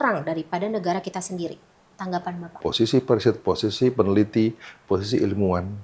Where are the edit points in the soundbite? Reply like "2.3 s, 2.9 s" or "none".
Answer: 2.6 s